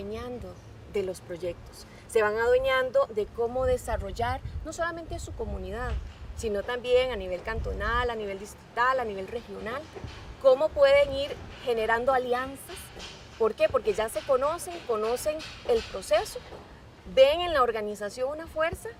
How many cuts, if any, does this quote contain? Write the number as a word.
zero